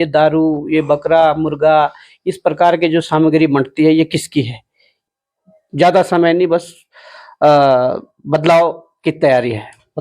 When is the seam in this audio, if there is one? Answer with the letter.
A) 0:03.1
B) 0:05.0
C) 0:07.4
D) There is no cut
B